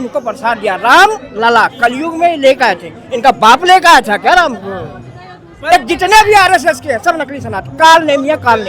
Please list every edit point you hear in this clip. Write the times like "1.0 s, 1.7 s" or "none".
5.5 s